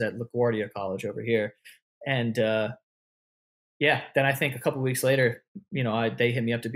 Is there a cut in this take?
no; 0 cuts

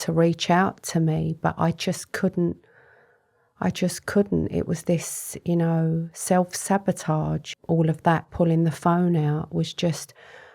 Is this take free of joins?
no; 1 cut; at 7.5 s

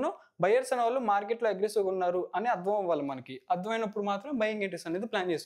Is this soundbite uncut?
yes; 0 cuts

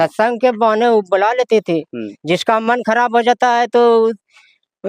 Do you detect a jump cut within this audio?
no; 0 cuts

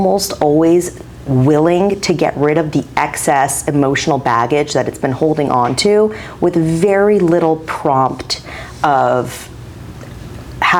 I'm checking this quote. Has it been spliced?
no; 0 cuts

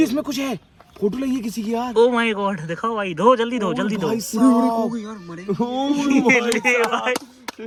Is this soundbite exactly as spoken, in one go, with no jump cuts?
yes; 0 cuts

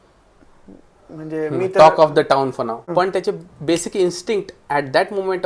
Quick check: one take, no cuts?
no; 1 cut; at 2.8 s

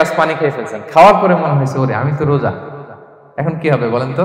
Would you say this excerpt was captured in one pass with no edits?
yes; 0 cuts

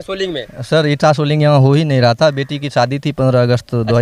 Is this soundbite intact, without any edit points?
yes; 0 cuts

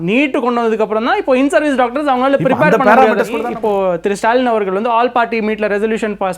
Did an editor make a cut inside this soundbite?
yes; 1 cut; at 3.4 s

